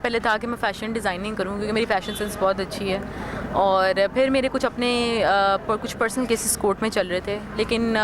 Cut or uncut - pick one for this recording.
uncut